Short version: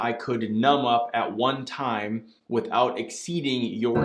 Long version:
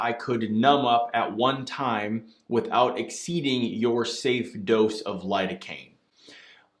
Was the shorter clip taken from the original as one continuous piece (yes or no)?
yes